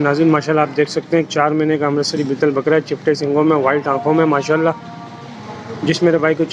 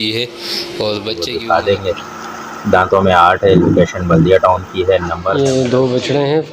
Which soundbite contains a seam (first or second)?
second